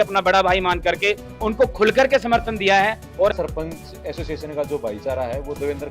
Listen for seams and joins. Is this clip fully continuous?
no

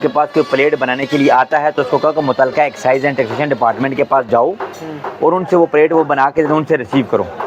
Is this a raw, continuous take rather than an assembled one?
yes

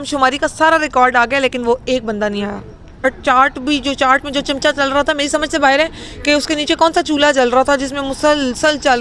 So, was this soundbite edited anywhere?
yes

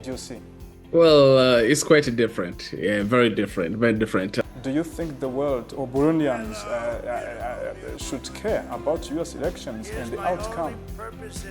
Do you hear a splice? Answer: yes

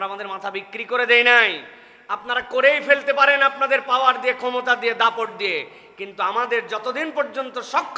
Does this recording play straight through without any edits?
yes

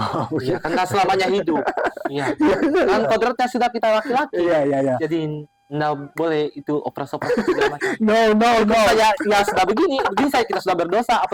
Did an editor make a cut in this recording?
no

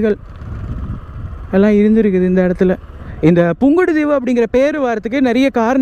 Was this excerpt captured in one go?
no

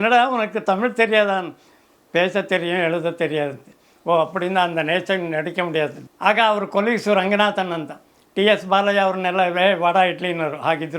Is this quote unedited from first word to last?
no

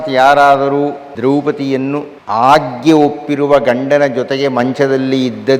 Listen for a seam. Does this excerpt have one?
yes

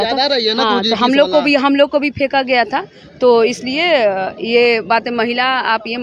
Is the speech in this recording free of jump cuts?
yes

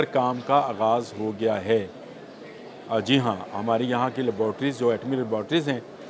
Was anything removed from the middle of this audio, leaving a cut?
no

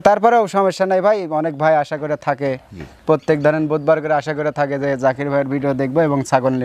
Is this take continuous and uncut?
yes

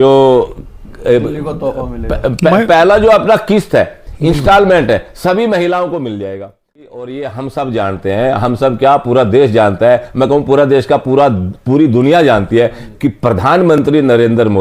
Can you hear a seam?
yes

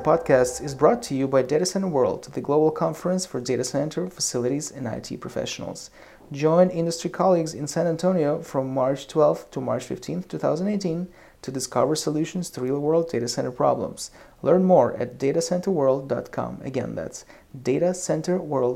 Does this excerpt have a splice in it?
no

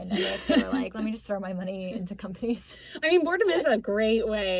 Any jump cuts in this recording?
no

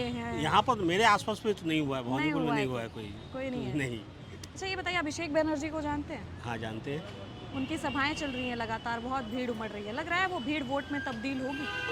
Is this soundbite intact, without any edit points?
yes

